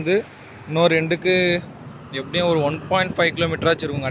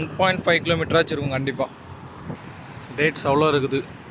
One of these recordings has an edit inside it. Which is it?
second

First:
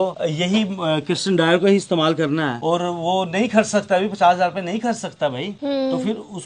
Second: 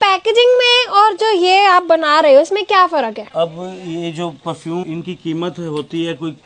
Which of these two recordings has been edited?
second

